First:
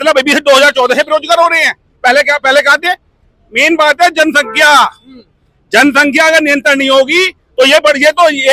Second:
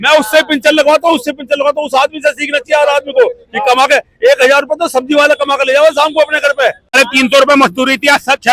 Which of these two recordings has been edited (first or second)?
second